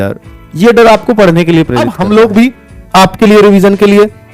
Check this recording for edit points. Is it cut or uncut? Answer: cut